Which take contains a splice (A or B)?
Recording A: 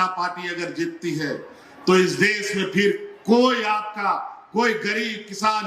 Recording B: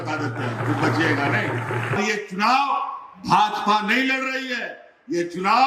B